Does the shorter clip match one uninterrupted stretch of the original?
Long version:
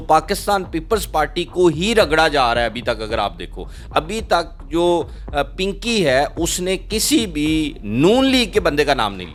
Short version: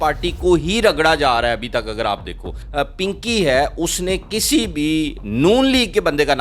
no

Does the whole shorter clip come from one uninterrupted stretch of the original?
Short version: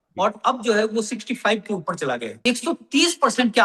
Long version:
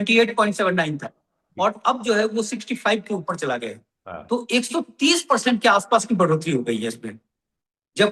no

